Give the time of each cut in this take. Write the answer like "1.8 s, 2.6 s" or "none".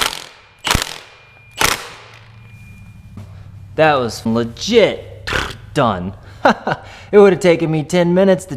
3.2 s, 4.2 s